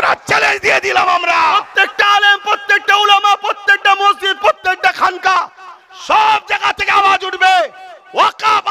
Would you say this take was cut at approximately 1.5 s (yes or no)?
yes